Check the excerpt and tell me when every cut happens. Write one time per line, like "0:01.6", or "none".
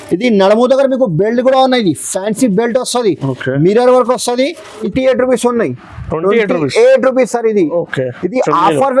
0:04.7